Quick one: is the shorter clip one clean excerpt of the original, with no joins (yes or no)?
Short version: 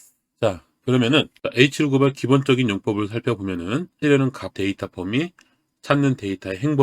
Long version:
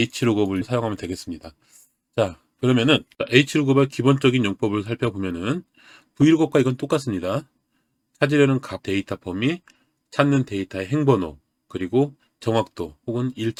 no